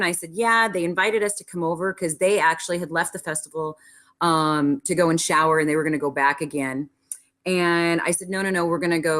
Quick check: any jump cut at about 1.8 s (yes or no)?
yes